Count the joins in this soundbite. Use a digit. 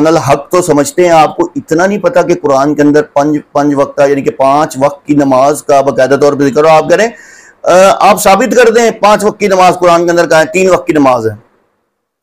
0